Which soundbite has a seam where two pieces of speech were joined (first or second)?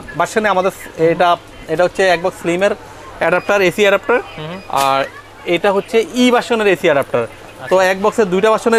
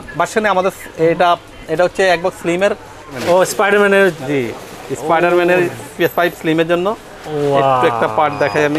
second